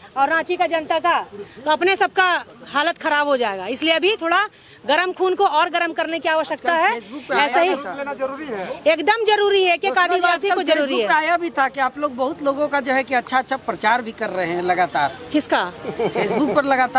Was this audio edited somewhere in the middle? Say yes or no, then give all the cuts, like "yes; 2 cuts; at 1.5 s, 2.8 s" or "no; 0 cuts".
no; 0 cuts